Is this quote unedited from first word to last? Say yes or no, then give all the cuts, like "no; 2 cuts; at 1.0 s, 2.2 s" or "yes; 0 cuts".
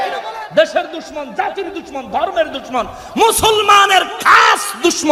yes; 0 cuts